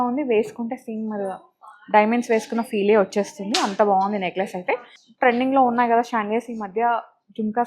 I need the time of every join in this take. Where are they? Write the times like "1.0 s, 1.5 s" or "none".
5.0 s